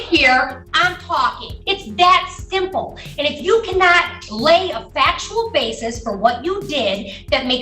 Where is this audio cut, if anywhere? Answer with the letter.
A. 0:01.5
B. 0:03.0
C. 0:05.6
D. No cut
A